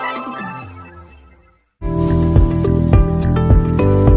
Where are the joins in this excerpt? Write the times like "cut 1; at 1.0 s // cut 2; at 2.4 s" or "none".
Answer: cut 1; at 1.6 s